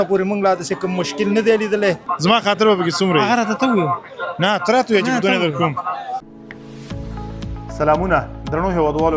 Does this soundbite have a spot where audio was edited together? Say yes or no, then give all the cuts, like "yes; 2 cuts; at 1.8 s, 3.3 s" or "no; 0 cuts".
yes; 2 cuts; at 2.1 s, 6.2 s